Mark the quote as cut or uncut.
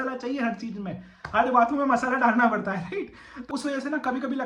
cut